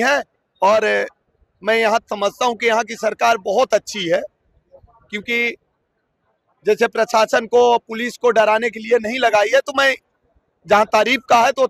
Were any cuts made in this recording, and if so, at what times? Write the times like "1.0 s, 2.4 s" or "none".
none